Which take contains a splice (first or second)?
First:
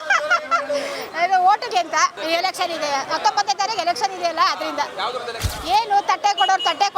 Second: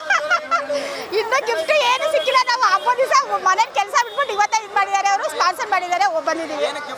first